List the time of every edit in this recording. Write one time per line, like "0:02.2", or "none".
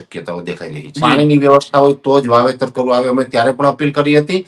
0:01.0